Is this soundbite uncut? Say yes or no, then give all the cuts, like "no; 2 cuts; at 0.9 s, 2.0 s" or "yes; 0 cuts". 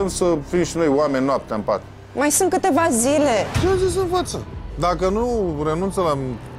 no; 1 cut; at 3.6 s